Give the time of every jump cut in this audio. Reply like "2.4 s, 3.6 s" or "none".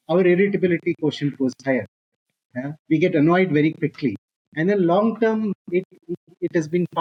none